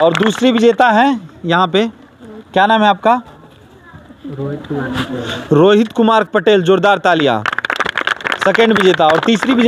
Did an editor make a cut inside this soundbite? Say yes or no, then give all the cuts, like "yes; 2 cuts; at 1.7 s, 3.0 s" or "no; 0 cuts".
no; 0 cuts